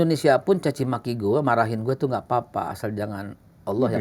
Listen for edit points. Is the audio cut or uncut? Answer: uncut